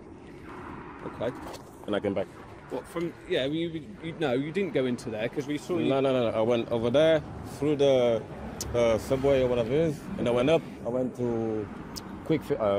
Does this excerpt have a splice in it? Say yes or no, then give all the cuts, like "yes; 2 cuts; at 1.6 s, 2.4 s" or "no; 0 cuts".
no; 0 cuts